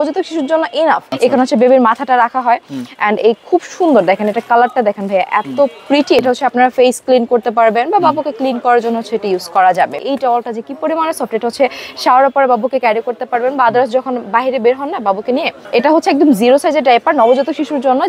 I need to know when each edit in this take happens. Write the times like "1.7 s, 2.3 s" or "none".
1.1 s, 6.2 s, 10.0 s, 15.6 s